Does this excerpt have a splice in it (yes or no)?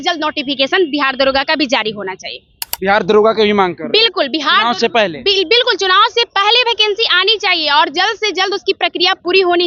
no